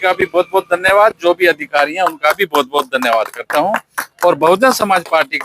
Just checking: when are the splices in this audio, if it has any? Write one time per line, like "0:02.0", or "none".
none